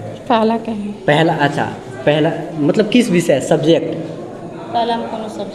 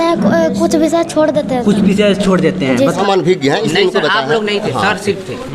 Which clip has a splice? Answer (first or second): second